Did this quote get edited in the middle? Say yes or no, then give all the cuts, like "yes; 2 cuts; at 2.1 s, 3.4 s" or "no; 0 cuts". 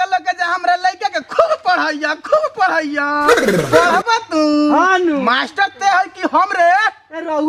no; 0 cuts